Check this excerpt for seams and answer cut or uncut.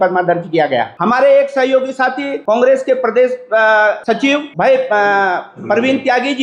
cut